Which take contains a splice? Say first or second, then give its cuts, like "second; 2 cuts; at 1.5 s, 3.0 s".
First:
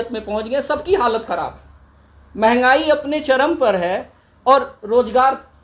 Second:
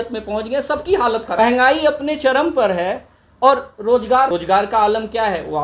second; 2 cuts; at 1.4 s, 4.3 s